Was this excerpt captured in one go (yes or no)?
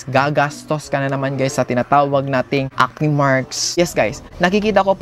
no